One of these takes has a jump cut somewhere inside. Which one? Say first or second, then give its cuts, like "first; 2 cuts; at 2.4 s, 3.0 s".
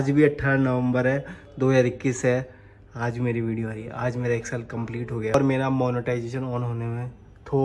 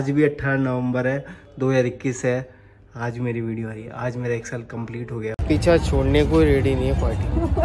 second; 1 cut; at 5.3 s